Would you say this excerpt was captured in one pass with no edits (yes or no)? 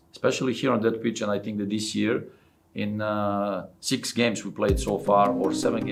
yes